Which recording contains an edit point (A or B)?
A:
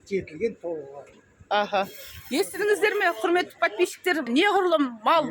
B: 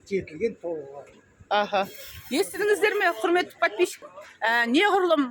A